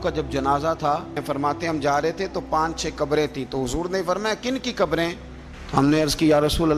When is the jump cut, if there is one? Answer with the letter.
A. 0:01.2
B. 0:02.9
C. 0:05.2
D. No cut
A